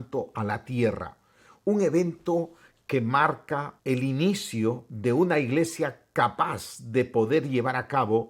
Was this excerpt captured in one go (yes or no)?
no